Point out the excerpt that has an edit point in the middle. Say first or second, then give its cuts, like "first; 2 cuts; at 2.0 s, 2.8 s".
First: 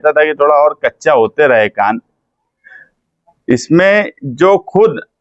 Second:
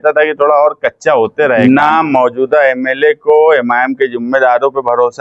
second; 1 cut; at 1.6 s